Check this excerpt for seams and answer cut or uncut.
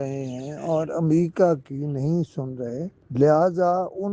cut